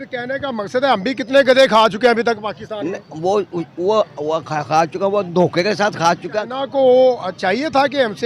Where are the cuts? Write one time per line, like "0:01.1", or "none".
0:06.5